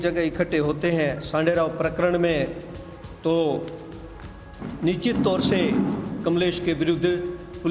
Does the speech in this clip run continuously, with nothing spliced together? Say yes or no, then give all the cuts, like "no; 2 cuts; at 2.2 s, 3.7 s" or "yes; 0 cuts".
yes; 0 cuts